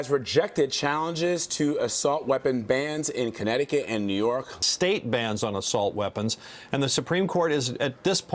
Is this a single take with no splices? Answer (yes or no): no